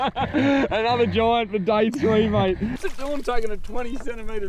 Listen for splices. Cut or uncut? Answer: cut